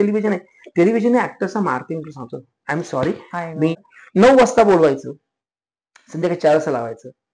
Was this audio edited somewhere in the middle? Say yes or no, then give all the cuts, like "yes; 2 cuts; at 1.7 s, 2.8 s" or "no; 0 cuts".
yes; 1 cut; at 3.8 s